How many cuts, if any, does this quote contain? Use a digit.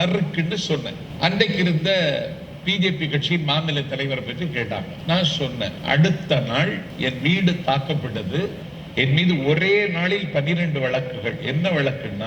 5